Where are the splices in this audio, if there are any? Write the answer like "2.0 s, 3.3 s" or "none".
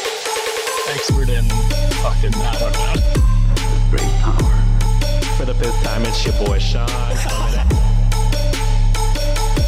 none